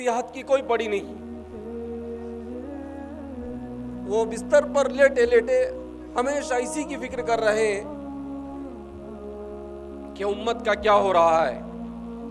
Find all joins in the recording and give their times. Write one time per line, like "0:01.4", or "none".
none